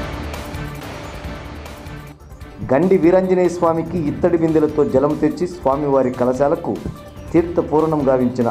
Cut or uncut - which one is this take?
cut